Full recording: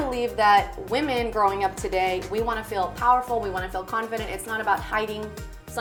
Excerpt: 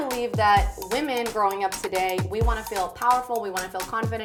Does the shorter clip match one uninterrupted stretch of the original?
yes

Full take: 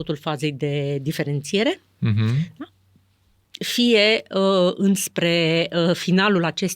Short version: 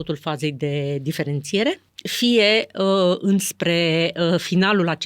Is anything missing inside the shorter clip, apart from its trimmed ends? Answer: yes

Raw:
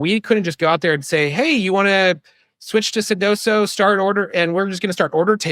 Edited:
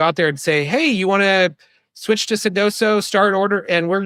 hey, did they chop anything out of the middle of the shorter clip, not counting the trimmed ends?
no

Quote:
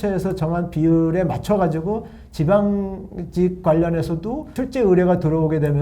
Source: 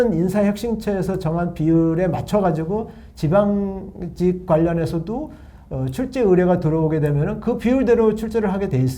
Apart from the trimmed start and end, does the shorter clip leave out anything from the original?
yes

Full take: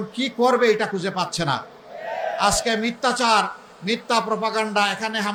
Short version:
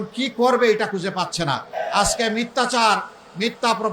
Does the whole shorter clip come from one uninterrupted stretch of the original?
no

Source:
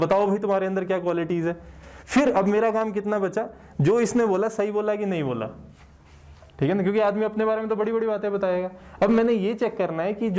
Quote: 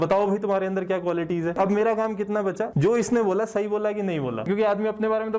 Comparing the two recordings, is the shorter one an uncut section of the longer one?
no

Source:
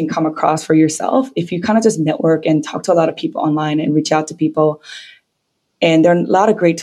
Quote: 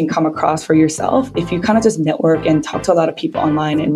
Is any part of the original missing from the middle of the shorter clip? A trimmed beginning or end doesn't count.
no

